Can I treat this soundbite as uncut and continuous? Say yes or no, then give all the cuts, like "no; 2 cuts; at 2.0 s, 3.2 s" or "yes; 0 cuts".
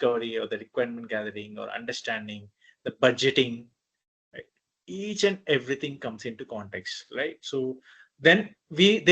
yes; 0 cuts